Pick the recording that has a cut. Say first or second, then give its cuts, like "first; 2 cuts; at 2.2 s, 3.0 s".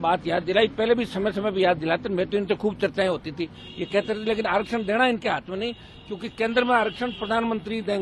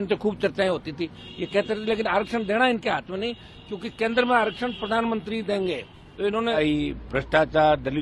second; 1 cut; at 6.6 s